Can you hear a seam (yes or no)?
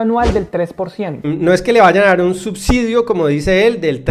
no